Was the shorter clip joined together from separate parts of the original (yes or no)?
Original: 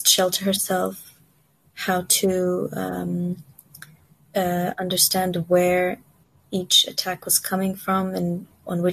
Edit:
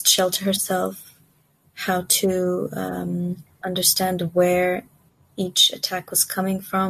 yes